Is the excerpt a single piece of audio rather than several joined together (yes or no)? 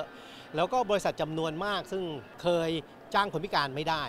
no